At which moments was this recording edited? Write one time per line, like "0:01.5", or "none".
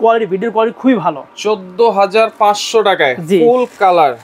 0:01.2